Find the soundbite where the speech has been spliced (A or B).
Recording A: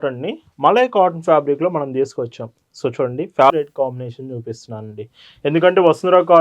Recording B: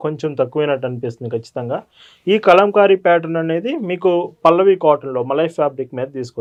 A